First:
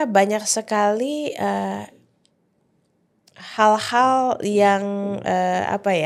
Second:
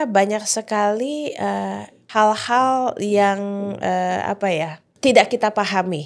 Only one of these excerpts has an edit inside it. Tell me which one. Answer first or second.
second